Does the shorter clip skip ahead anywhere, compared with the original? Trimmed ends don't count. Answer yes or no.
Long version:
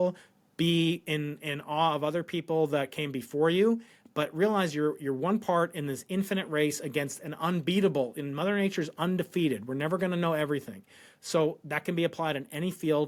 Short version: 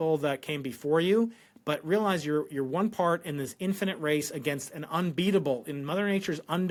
no